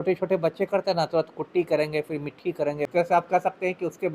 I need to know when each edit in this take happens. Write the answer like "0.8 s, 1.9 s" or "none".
2.9 s